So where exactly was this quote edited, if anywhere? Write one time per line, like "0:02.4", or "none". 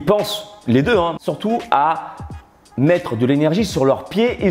0:01.2